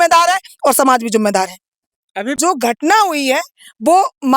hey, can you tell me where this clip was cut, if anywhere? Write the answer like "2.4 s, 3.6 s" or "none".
2.4 s